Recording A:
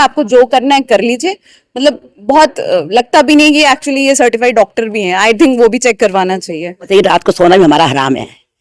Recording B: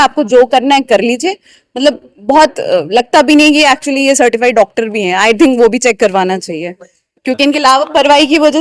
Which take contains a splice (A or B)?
A